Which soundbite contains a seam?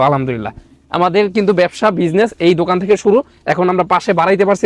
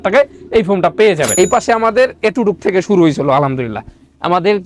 second; 1 cut; at 1.3 s

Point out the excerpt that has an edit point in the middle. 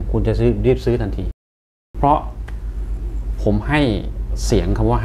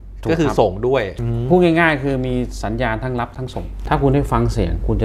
second; 2 cuts; at 1.2 s, 3.7 s

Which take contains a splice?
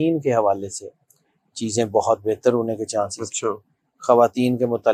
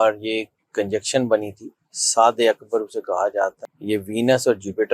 second; 1 cut; at 3.7 s

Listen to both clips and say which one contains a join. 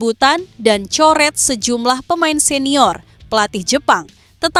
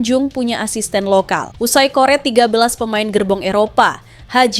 second; 1 cut; at 1.5 s

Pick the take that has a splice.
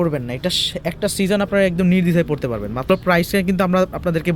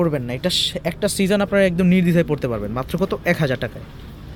first; 1 cut; at 2.9 s

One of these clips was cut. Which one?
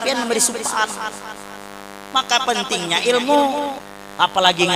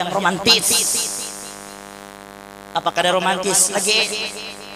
first; 1 cut; at 3.8 s

